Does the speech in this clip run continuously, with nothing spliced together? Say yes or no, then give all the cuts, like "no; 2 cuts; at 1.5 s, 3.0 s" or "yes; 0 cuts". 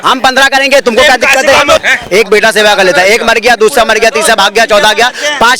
no; 1 cut; at 1.8 s